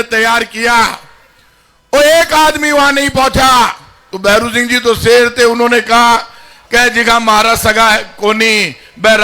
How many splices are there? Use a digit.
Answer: 0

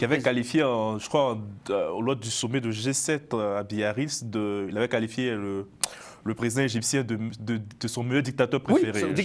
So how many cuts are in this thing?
0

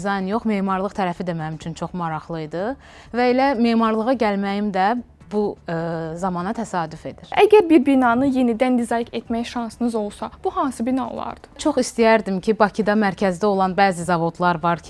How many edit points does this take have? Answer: 2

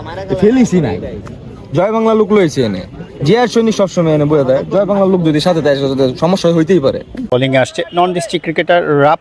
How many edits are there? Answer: 1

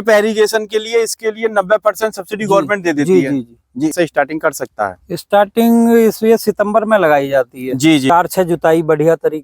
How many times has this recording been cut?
2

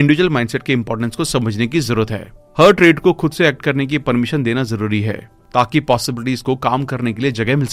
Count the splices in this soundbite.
0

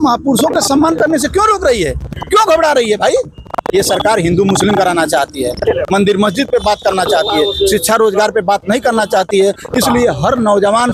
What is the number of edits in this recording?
0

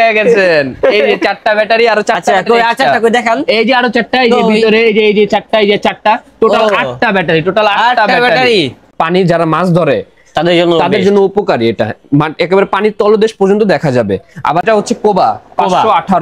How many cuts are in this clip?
2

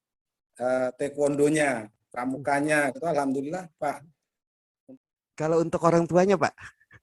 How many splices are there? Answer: 1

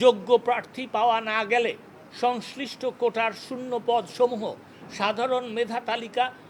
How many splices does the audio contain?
0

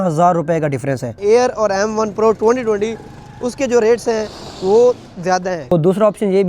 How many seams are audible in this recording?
2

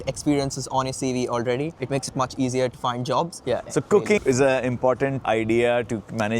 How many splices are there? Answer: 2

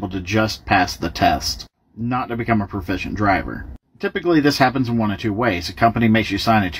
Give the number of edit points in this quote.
1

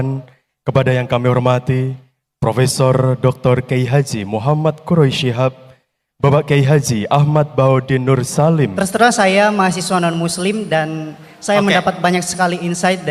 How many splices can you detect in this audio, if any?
1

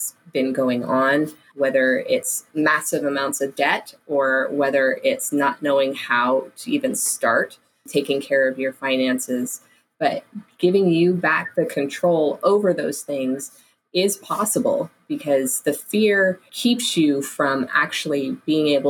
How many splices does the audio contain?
3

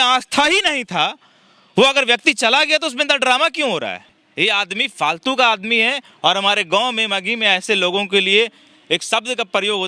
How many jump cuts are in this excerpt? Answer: 1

